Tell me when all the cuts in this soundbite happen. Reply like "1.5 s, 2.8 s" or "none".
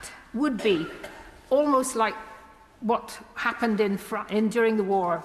none